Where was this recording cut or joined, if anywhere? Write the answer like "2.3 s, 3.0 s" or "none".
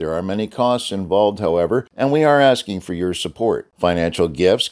1.9 s